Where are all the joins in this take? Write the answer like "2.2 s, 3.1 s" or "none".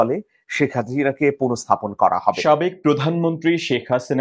2.4 s

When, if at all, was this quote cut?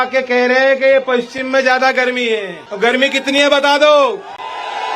2.6 s

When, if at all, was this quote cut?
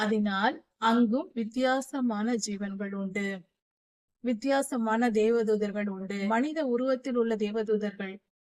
6.1 s

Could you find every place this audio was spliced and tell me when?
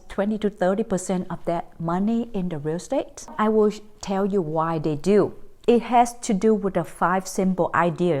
3.3 s, 5.5 s

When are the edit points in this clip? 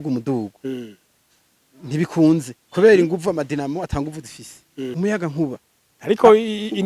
4.9 s

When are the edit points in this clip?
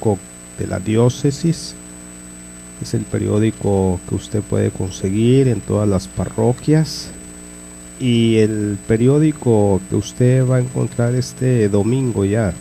9.1 s

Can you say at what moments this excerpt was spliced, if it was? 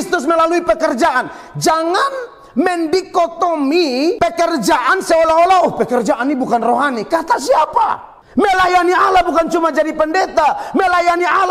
4.2 s, 8.1 s

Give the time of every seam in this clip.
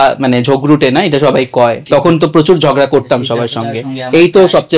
1.8 s

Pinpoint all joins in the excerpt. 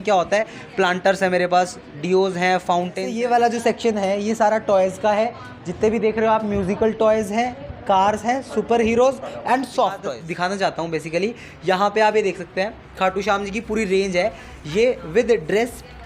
3.1 s, 10.2 s

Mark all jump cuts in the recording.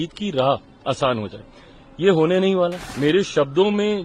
2.8 s

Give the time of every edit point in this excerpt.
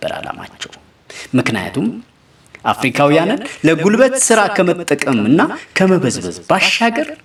none

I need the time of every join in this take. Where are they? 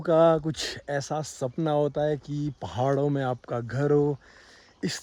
none

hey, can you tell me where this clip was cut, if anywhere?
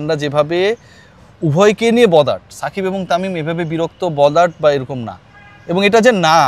none

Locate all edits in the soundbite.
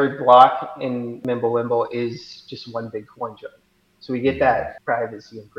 1.1 s, 4.8 s

